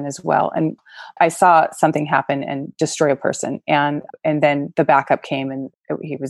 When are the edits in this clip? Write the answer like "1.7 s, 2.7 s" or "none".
1.0 s